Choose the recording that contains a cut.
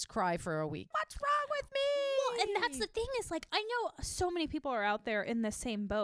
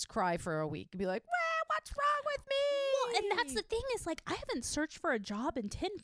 first; 2 cuts; at 0.9 s, 3.5 s

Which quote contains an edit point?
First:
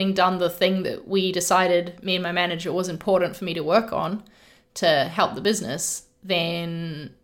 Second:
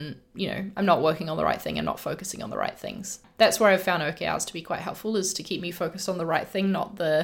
second; 1 cut; at 3.2 s

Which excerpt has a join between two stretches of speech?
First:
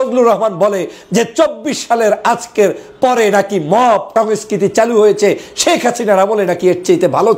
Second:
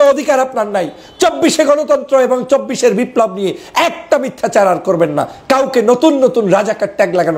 first; 1 cut; at 4.1 s

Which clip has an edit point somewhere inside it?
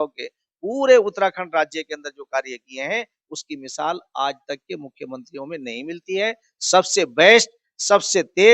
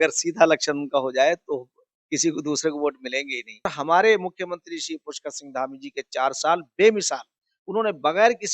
second; 1 cut; at 3.8 s

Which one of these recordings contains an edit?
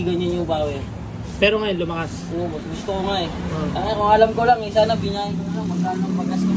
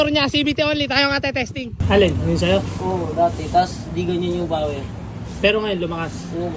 second; 1 cut; at 1.8 s

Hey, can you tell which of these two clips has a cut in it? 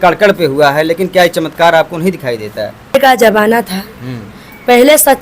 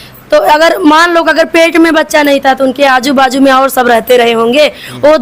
first; 1 cut; at 2.9 s

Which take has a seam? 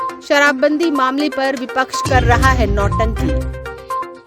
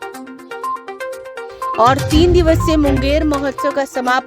second; 1 cut; at 0.9 s

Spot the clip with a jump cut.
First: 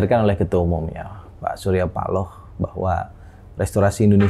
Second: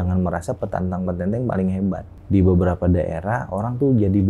second; 1 cut; at 2.1 s

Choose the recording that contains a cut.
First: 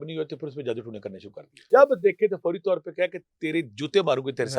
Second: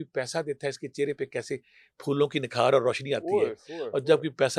first; 1 cut; at 1.6 s

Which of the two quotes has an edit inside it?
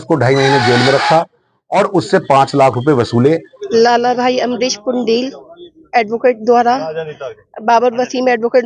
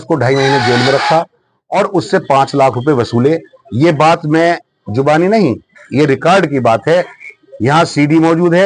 first; 1 cut; at 3.6 s

